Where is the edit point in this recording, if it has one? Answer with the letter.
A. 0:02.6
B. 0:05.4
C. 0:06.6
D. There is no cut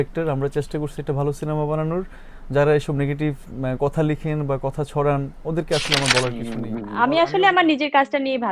C